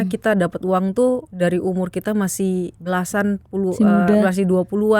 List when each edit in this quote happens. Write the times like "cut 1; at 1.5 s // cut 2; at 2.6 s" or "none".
cut 1; at 1.3 s // cut 2; at 2.8 s